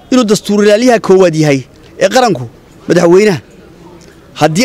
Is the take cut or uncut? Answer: uncut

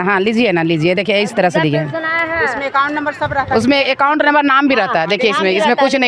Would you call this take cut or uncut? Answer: uncut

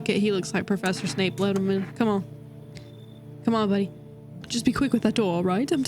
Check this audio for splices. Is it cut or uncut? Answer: uncut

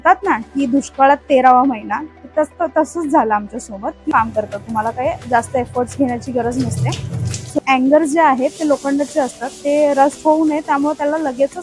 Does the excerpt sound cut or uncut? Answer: cut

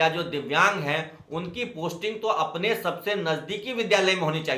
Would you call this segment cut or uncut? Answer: uncut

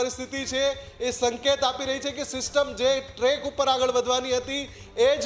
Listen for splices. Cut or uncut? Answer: uncut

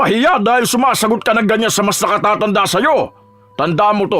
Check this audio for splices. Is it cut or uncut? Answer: uncut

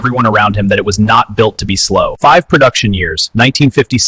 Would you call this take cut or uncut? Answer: cut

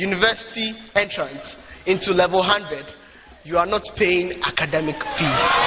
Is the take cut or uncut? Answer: uncut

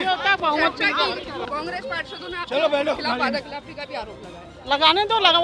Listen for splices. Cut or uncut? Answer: cut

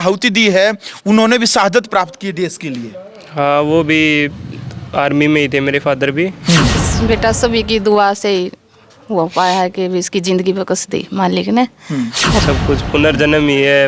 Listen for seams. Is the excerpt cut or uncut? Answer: cut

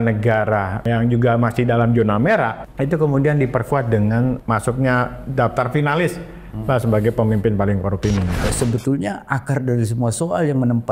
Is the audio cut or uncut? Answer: cut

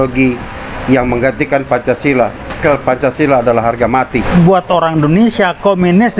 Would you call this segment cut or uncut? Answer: cut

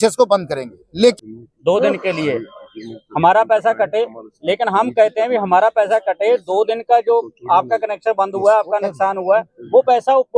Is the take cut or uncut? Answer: cut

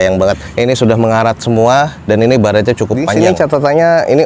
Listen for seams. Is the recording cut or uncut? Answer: cut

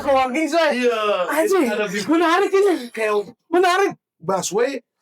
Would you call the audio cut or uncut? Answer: uncut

